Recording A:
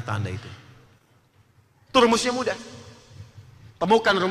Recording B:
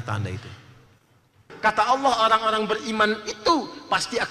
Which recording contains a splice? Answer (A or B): B